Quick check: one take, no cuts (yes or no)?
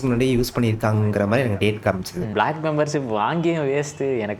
no